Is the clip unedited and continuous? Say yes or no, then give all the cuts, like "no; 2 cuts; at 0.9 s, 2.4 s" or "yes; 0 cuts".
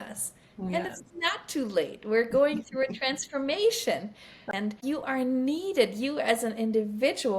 no; 1 cut; at 4.4 s